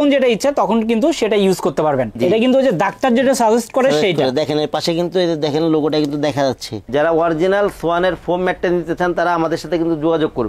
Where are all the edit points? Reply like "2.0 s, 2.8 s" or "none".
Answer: 2.2 s, 6.8 s